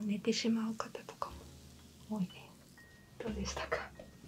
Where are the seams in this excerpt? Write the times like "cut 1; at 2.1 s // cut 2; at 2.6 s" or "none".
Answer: cut 1; at 3.2 s